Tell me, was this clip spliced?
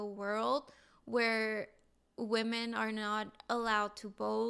no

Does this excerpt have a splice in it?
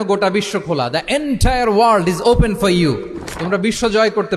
no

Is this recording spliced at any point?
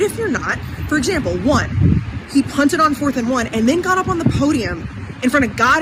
no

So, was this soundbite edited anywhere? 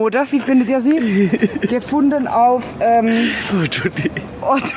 no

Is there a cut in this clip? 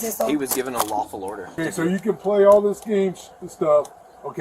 yes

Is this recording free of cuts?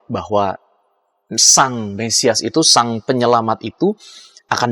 yes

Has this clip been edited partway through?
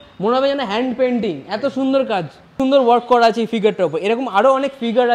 yes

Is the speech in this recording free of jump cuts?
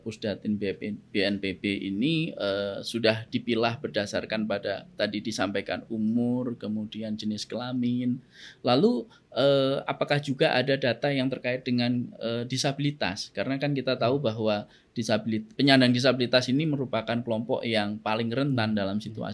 yes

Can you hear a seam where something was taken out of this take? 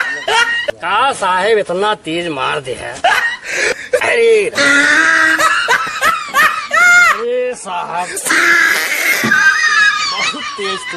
no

